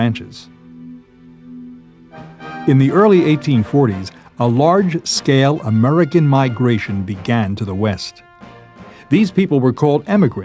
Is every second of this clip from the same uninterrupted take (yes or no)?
no